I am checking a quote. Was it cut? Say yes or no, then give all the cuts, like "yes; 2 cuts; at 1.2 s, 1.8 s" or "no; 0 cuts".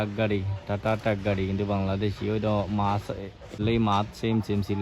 yes; 1 cut; at 3.5 s